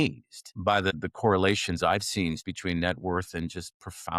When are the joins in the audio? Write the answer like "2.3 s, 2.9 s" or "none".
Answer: 1.0 s, 2.4 s